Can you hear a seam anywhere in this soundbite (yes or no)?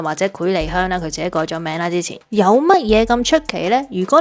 yes